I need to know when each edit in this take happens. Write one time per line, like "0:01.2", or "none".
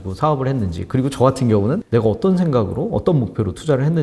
0:01.8